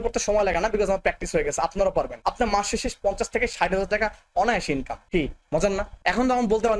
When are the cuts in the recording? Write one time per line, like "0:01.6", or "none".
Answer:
0:02.1
0:05.0
0:05.9